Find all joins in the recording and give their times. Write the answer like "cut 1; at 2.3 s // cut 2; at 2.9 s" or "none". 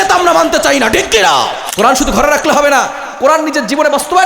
cut 1; at 1.6 s